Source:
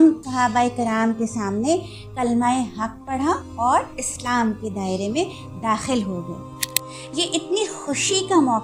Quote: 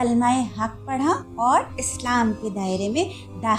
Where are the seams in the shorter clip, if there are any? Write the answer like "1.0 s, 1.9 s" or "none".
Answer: none